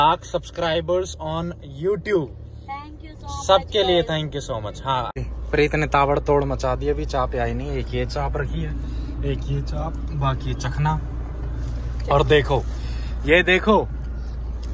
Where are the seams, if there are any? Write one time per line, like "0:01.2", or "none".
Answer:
0:05.2